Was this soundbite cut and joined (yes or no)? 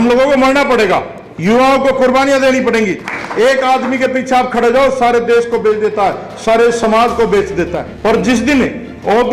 yes